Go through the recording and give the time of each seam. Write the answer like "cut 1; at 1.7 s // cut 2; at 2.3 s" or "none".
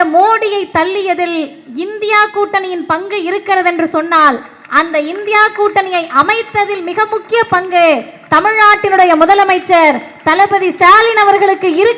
none